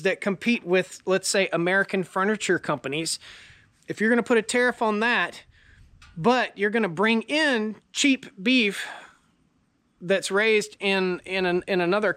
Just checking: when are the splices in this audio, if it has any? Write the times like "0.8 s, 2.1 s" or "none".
none